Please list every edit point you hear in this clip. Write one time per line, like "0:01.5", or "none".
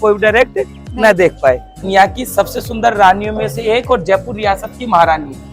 0:01.7